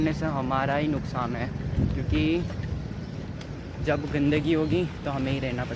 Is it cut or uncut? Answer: uncut